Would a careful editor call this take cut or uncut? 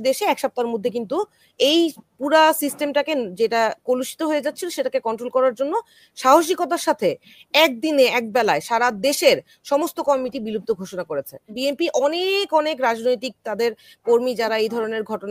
cut